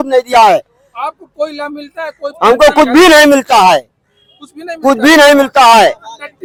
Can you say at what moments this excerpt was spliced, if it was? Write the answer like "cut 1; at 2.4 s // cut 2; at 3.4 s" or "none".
none